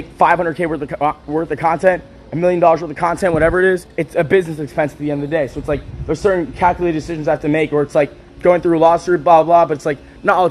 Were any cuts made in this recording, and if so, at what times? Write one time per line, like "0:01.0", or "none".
0:03.9